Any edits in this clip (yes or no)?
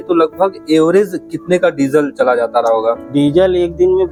no